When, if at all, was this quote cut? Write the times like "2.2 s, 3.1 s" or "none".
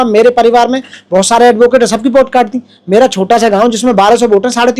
none